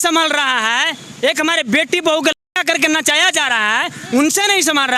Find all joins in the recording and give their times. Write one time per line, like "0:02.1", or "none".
none